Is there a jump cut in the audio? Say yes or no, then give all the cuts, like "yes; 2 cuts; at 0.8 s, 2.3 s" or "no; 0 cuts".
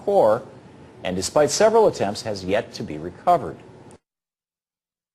yes; 1 cut; at 2.8 s